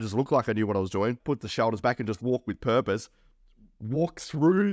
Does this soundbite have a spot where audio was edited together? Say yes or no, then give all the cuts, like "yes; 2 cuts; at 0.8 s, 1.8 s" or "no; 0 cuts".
yes; 1 cut; at 1.2 s